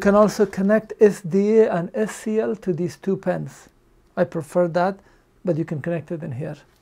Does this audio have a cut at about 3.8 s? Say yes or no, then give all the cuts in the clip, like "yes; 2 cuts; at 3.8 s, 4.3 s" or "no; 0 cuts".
no; 0 cuts